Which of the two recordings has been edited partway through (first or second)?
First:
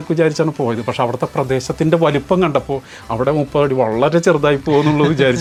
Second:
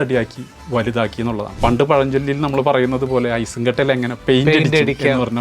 second